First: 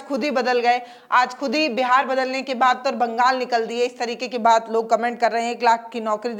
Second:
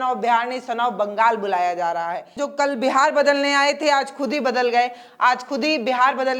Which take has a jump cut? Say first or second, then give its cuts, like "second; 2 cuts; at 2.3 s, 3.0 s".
second; 1 cut; at 2.4 s